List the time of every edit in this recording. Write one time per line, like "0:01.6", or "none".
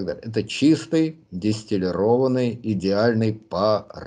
none